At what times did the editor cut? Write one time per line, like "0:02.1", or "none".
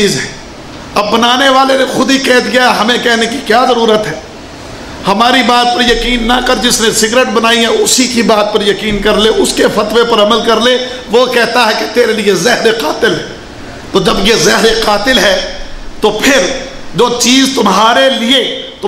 none